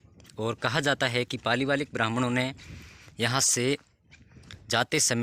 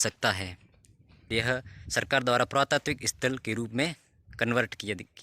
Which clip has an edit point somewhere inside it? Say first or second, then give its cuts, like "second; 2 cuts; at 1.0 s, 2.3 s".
second; 1 cut; at 1.3 s